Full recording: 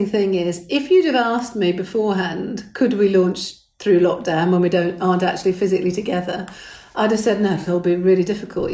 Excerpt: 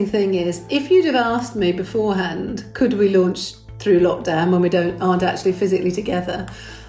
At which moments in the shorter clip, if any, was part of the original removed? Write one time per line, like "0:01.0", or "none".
none